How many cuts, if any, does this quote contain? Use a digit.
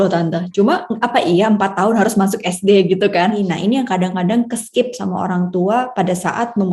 1